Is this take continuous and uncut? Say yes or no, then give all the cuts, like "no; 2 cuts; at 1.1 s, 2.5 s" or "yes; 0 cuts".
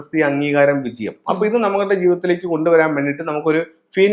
yes; 0 cuts